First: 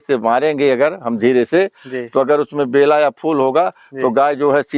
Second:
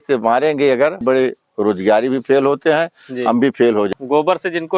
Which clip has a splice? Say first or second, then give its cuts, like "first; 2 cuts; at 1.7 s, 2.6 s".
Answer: second; 2 cuts; at 1.0 s, 3.9 s